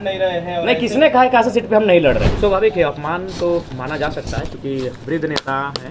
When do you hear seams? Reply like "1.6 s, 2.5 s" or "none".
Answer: 2.3 s